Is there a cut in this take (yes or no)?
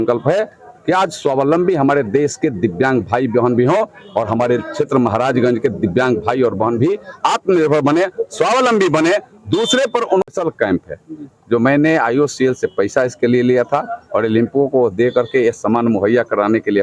yes